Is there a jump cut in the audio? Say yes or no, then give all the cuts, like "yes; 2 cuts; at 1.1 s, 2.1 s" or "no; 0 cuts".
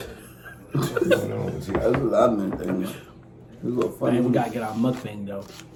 no; 0 cuts